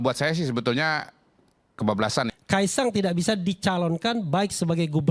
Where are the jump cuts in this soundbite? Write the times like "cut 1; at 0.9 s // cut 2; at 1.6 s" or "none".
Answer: cut 1; at 2.3 s